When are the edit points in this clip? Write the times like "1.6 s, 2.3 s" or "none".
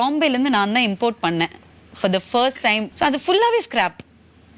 2.9 s